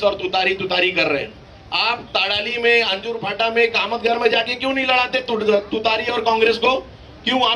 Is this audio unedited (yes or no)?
yes